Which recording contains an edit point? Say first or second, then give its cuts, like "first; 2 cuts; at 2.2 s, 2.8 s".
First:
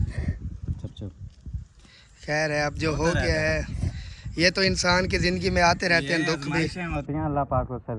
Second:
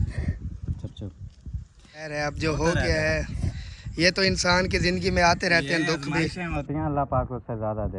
second; 1 cut; at 2.1 s